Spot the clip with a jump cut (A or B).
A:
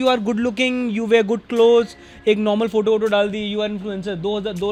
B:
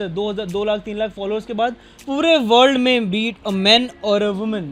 B